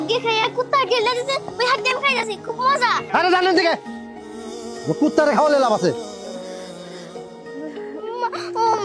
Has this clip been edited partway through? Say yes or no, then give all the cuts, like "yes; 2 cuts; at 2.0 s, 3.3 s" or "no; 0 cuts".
yes; 1 cut; at 3.0 s